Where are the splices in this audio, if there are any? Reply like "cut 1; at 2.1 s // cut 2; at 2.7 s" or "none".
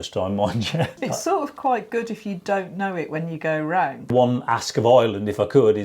cut 1; at 1.0 s // cut 2; at 4.1 s